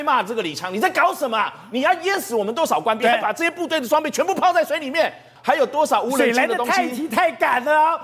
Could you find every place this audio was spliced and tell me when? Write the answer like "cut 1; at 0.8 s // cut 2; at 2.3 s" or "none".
cut 1; at 5.3 s